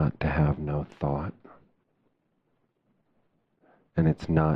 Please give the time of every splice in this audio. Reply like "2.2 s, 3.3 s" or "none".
none